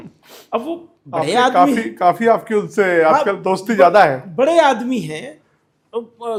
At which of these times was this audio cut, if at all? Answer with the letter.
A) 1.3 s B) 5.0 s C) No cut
C